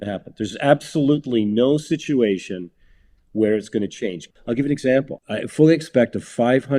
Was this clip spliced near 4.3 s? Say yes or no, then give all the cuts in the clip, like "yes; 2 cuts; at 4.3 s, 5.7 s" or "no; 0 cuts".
yes; 2 cuts; at 4.3 s, 5.2 s